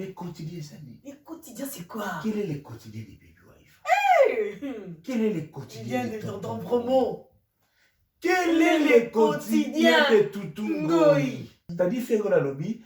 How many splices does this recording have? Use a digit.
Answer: 1